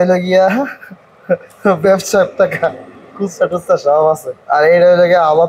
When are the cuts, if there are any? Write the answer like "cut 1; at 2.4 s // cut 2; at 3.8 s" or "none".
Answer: cut 1; at 4.3 s